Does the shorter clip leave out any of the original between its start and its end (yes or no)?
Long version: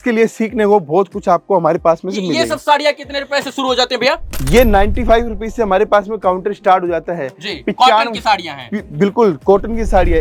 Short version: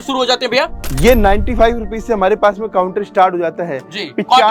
no